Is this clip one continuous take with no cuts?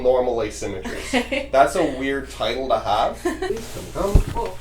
no; 1 cut; at 3.5 s

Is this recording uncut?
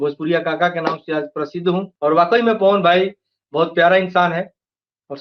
no; 1 cut; at 1.9 s

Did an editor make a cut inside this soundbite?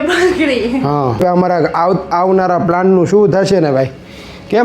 yes; 1 cut; at 1.2 s

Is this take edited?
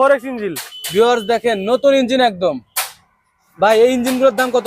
no; 0 cuts

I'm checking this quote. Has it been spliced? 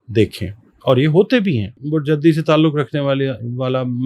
yes; 1 cut; at 1.7 s

